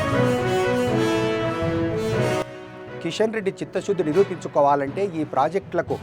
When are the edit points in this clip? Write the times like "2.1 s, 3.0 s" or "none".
none